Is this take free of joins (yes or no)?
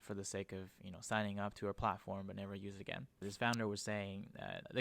no